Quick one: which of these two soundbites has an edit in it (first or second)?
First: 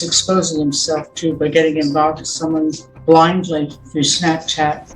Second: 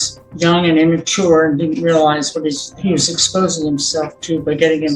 first